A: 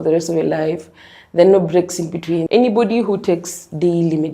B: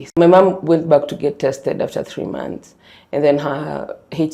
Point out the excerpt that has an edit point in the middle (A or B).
A